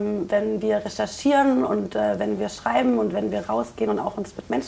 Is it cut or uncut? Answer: cut